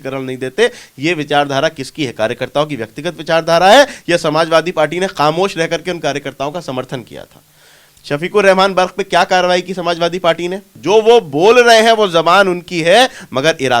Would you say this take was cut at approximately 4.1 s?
no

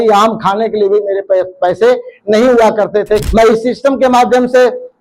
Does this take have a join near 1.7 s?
no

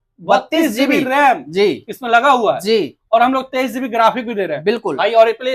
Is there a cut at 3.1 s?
no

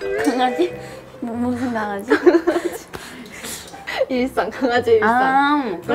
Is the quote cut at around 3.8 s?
yes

